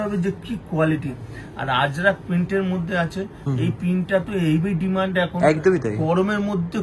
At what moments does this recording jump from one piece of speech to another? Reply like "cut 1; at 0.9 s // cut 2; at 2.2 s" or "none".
none